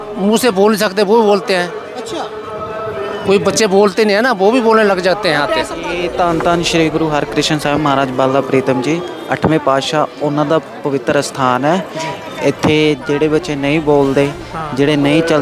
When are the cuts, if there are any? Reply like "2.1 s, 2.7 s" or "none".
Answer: 6.0 s